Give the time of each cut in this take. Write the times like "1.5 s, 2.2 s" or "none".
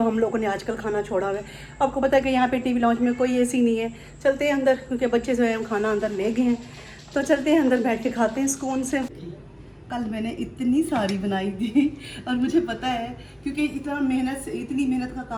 none